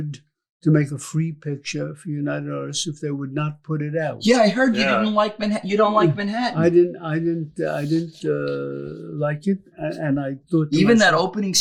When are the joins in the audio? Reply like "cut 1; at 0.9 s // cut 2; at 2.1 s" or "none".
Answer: none